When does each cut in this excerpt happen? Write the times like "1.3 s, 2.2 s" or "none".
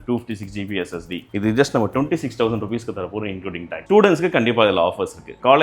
1.2 s, 3.7 s

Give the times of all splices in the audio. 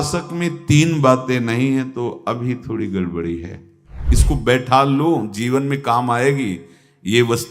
4.1 s

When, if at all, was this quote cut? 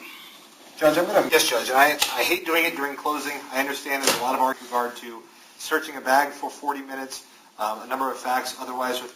1.3 s, 4.6 s

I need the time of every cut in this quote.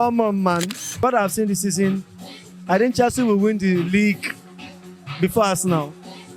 1.0 s

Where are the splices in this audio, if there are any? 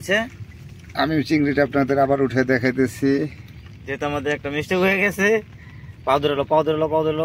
none

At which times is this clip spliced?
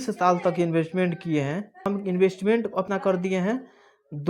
1.8 s, 2.9 s

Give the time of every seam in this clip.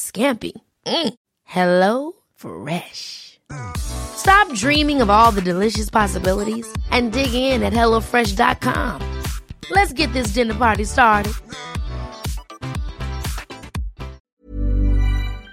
14.3 s

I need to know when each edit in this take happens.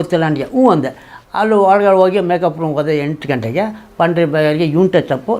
none

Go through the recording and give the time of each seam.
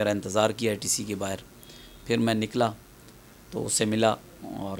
none

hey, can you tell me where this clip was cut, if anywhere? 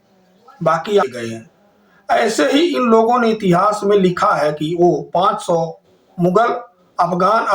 1.1 s

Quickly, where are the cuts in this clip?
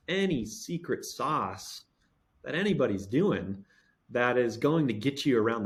none

